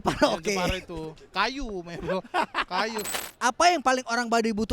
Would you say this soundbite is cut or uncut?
cut